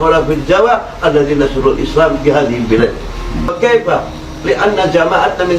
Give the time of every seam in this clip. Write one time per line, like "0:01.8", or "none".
0:03.5